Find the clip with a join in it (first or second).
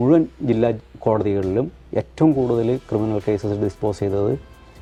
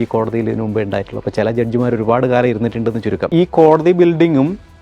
second